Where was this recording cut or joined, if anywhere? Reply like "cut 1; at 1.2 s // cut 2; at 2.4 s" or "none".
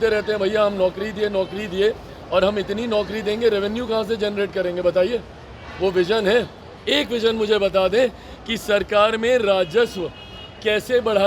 none